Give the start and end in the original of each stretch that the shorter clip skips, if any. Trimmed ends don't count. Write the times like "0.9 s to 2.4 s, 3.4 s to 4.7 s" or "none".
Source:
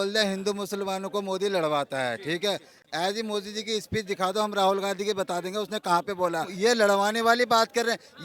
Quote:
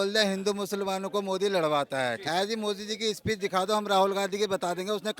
2.2 s to 2.9 s